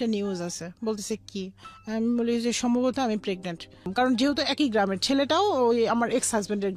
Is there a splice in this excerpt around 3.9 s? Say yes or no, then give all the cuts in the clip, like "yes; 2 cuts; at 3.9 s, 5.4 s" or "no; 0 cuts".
yes; 1 cut; at 3.9 s